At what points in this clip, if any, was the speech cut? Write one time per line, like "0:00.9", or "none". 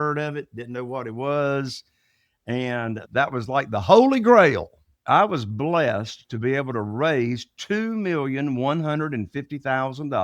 0:03.0
0:05.0